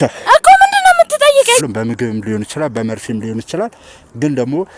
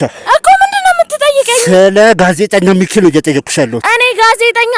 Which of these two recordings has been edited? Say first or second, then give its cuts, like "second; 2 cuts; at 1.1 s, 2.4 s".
first; 1 cut; at 1.6 s